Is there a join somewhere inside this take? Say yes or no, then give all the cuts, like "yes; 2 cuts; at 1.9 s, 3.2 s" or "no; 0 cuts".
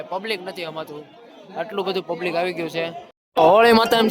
yes; 1 cut; at 3.2 s